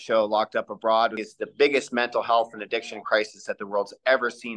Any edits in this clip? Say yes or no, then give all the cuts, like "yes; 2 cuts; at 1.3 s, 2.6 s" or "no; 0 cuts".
yes; 1 cut; at 1.2 s